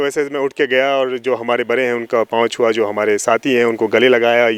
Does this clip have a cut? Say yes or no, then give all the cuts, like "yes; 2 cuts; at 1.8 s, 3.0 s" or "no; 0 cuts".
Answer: no; 0 cuts